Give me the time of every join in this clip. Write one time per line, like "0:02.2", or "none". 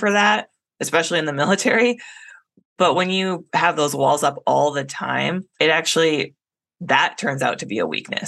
0:05.5

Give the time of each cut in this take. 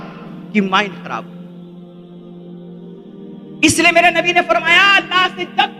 0:01.5
0:03.5

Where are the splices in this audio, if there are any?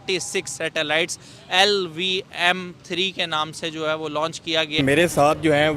0:04.8

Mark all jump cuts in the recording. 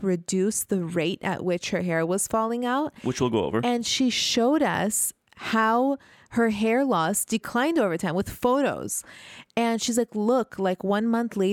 none

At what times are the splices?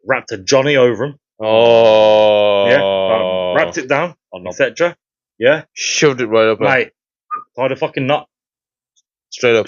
none

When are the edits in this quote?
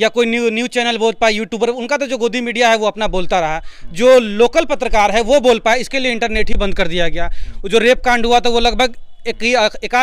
none

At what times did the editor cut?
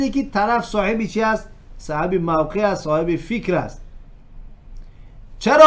none

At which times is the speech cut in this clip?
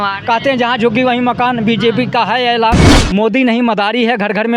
0:02.9

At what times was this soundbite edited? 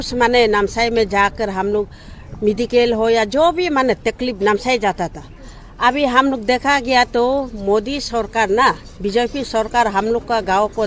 none

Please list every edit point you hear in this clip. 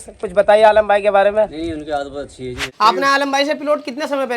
0:02.6

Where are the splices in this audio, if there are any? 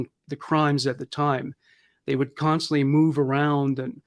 none

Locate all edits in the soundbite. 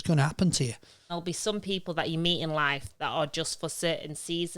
0:01.2

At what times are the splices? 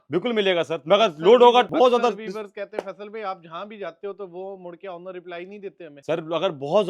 0:01.7
0:05.9

